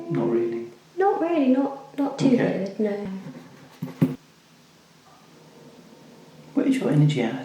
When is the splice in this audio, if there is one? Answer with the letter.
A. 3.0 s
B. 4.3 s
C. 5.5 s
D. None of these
B